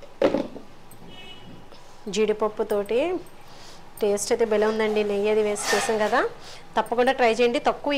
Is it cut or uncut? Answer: uncut